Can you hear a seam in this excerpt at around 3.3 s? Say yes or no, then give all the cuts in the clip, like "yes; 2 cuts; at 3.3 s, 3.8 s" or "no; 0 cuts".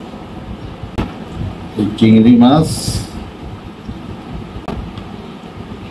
no; 1 cut; at 1.0 s